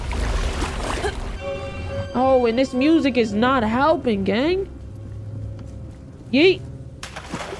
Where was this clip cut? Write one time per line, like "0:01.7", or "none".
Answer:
0:01.3